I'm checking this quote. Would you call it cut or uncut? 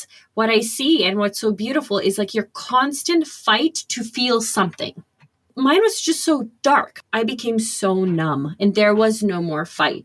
cut